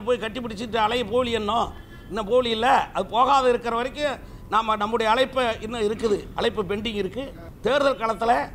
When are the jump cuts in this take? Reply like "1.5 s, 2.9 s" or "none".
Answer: 7.4 s